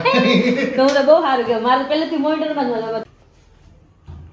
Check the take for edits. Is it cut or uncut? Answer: cut